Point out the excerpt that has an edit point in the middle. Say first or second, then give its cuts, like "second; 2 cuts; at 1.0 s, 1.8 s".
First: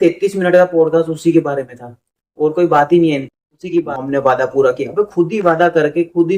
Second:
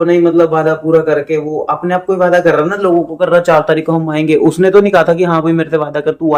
first; 1 cut; at 4.0 s